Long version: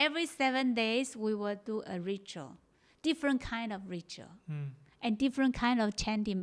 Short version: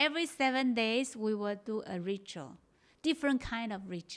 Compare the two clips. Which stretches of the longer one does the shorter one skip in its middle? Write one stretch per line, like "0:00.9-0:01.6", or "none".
none